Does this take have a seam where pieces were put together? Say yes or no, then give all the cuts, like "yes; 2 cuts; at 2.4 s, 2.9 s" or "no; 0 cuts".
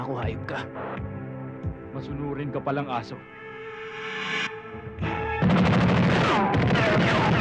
yes; 2 cuts; at 3.4 s, 4.9 s